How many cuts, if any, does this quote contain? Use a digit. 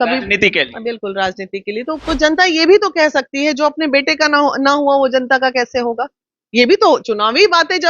1